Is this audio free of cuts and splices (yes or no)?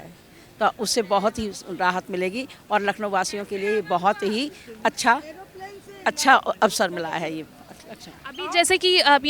yes